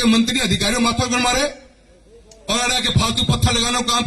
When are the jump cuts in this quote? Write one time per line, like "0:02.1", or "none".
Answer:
none